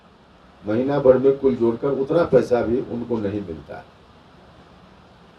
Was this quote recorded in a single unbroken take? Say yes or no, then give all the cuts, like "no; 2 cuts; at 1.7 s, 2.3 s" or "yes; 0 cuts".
yes; 0 cuts